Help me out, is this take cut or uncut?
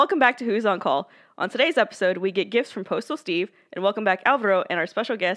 uncut